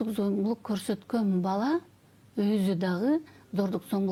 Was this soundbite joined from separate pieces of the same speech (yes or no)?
no